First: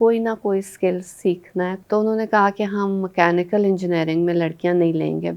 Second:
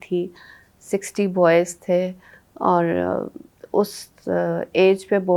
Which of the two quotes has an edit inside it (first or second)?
first